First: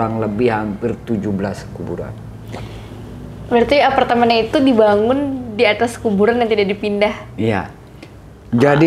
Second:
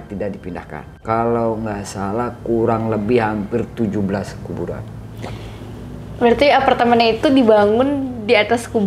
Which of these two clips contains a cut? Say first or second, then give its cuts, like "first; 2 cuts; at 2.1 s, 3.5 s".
second; 1 cut; at 0.9 s